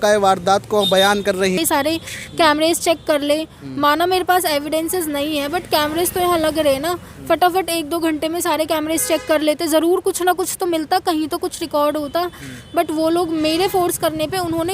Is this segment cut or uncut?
cut